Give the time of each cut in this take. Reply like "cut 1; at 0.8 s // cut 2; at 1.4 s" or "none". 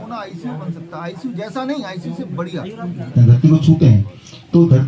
cut 1; at 3.1 s